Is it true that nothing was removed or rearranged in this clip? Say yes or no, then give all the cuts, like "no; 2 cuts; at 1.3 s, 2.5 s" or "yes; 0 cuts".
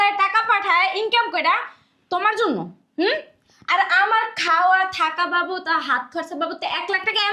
yes; 0 cuts